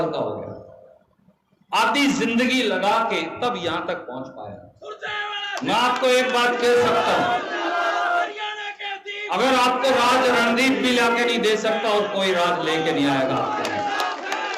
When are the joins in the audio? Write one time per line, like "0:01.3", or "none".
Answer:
none